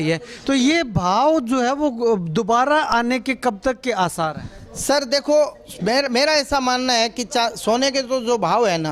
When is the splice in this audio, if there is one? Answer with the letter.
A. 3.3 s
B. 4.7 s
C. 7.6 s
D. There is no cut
D